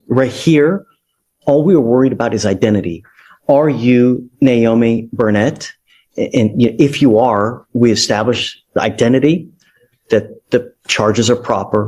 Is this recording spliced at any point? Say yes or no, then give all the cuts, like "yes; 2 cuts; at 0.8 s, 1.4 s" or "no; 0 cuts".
no; 0 cuts